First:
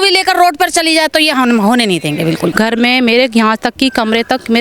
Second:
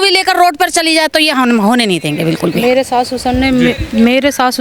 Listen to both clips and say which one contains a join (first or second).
first